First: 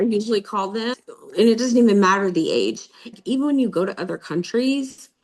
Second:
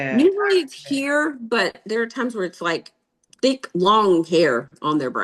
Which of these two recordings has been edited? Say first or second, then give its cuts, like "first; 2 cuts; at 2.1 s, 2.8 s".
first; 2 cuts; at 0.9 s, 3.0 s